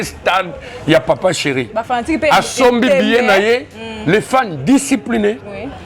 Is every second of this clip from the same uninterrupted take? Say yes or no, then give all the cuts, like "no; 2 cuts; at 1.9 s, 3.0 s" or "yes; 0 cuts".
yes; 0 cuts